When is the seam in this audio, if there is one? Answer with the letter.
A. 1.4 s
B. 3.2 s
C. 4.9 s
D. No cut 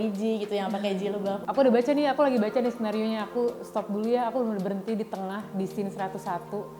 A